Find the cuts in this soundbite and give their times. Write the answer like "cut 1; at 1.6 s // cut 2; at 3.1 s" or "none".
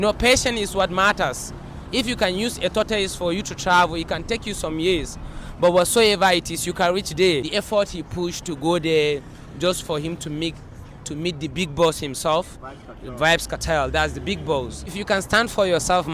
cut 1; at 7.5 s // cut 2; at 14.9 s